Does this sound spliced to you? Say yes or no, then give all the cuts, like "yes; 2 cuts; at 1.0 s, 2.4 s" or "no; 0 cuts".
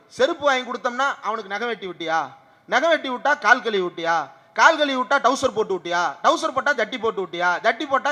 no; 0 cuts